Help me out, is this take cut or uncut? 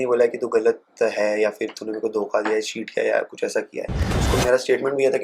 cut